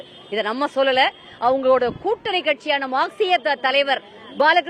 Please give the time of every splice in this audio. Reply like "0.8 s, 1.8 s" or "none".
none